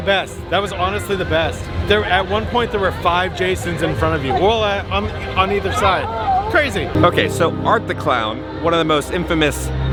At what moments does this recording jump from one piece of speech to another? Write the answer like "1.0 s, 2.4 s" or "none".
none